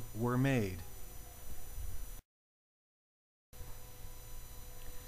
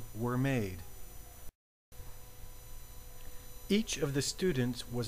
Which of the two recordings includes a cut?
second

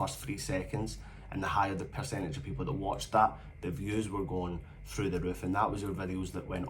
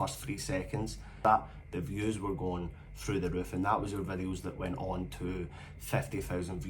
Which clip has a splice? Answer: second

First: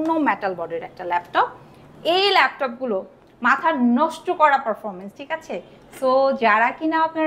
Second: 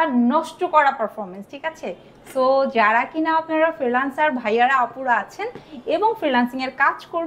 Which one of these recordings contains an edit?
first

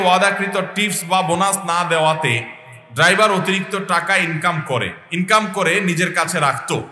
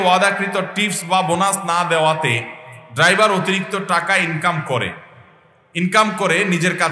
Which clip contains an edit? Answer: first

